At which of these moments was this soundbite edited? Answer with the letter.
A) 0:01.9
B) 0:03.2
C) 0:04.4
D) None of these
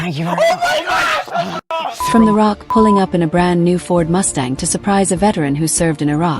A